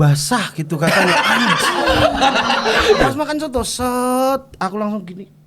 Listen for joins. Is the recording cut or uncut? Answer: cut